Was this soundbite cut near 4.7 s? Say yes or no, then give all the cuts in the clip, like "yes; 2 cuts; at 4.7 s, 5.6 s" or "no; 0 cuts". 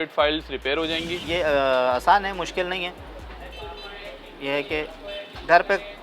no; 1 cut; at 1.1 s